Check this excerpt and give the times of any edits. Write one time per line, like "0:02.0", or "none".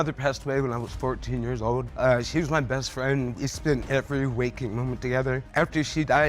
0:01.9
0:03.8
0:05.5